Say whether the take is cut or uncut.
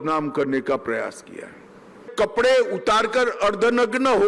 cut